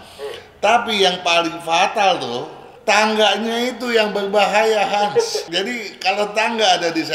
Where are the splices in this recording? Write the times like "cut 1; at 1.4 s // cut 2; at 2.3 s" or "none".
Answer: cut 1; at 2.7 s // cut 2; at 5.4 s